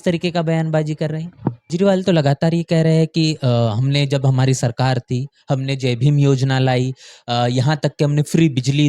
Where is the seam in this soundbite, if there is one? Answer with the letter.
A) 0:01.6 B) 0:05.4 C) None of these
A